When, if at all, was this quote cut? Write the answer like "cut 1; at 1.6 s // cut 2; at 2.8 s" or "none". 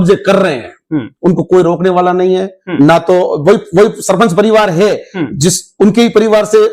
none